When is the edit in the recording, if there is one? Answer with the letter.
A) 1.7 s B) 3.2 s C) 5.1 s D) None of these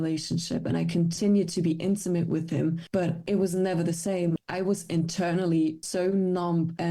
B